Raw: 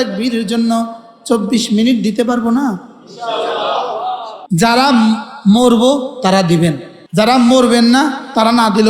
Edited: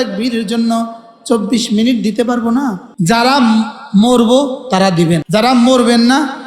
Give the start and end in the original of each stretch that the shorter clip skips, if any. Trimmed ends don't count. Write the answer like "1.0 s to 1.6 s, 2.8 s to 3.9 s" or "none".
2.9 s to 4.4 s, 6.8 s to 7.1 s